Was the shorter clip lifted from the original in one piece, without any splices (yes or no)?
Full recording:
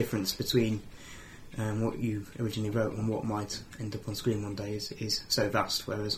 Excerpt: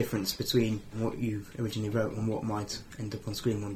no